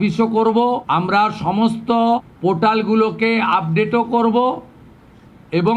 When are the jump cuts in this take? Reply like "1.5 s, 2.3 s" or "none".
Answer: 0.8 s, 2.3 s